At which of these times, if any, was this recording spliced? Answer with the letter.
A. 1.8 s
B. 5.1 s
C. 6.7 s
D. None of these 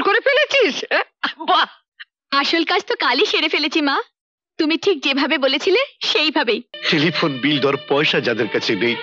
C